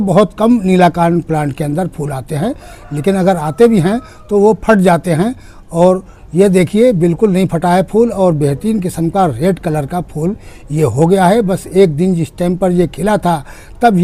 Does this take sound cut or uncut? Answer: uncut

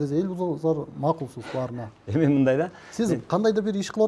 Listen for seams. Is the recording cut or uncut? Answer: uncut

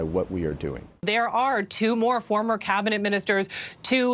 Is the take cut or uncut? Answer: cut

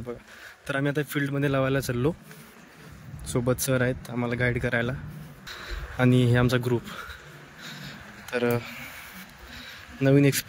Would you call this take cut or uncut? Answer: uncut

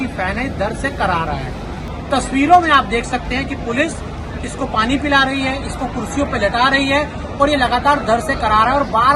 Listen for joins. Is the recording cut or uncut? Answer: cut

